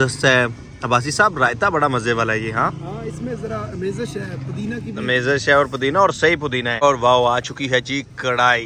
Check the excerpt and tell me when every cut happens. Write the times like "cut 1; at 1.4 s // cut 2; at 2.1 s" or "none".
cut 1; at 6.8 s